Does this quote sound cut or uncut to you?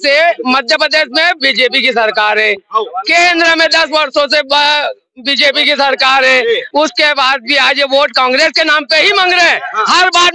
uncut